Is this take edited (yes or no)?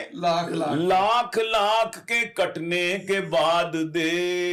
no